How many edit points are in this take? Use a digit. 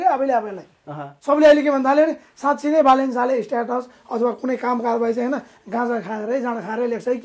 0